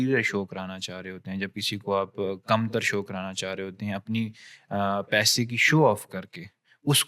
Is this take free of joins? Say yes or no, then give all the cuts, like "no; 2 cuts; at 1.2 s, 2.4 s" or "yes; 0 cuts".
yes; 0 cuts